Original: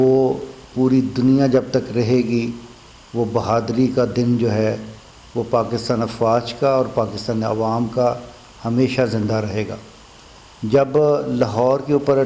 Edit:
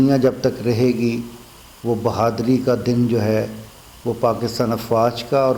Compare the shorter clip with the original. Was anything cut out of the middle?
no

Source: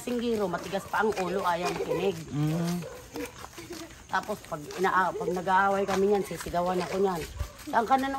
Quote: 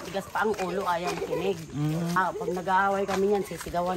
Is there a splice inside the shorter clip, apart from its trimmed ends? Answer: yes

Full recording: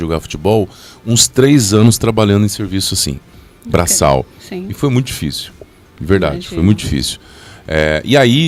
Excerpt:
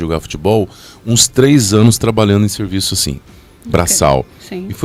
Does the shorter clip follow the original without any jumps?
yes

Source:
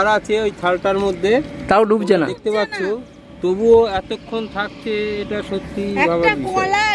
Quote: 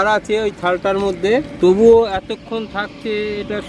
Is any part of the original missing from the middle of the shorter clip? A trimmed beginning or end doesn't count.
yes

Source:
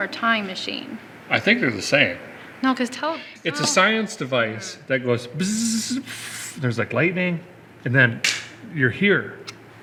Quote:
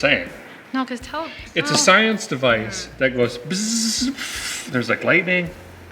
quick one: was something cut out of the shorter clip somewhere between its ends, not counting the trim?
no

